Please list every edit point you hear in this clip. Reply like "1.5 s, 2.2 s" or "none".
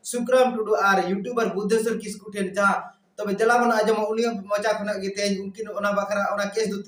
none